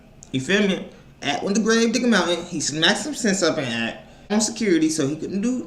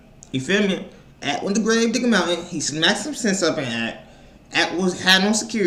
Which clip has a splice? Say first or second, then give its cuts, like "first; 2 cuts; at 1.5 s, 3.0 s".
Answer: first; 1 cut; at 4.3 s